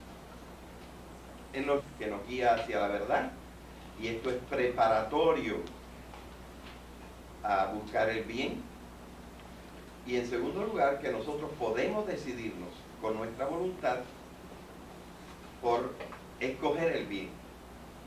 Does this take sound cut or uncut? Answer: uncut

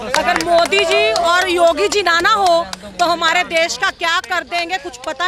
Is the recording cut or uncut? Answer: uncut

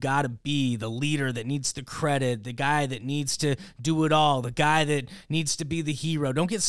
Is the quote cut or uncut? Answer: uncut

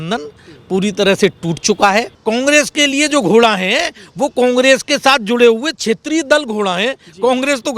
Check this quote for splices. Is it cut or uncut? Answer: cut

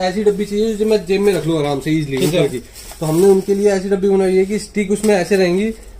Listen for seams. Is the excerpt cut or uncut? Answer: uncut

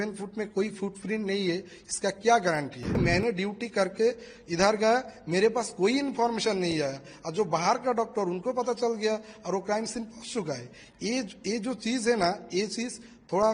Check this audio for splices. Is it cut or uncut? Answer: cut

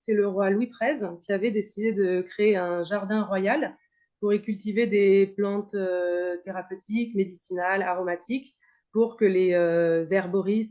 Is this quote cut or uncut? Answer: uncut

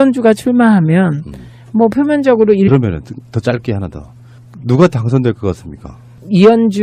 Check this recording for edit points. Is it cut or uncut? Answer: uncut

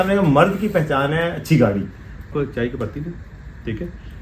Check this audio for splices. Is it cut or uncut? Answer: cut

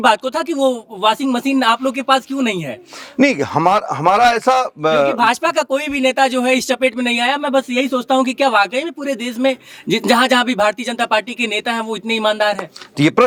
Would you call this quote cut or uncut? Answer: uncut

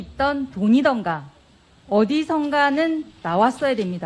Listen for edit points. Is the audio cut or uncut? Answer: uncut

